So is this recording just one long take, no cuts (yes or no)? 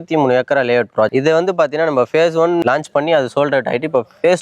no